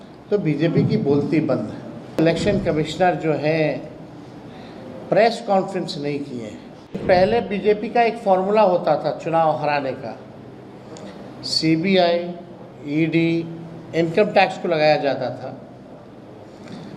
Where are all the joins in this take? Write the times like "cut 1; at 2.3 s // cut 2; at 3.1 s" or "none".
cut 1; at 2.2 s // cut 2; at 7.0 s

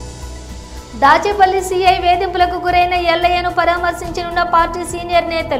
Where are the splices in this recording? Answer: cut 1; at 0.9 s

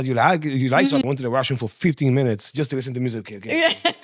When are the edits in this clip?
cut 1; at 1.0 s

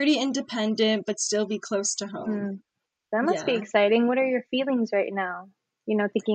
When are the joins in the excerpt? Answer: cut 1; at 3.0 s

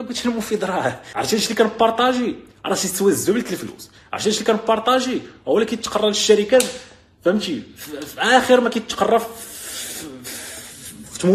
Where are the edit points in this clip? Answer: cut 1; at 1.1 s

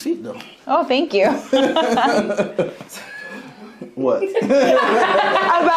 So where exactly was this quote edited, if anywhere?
none

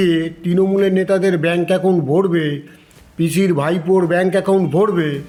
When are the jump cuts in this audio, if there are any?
none

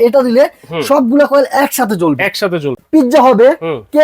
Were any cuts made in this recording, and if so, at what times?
cut 1; at 2.7 s

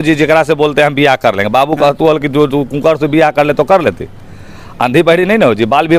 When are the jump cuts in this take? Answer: none

